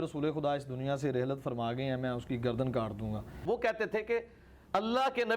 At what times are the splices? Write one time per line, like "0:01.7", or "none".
0:03.3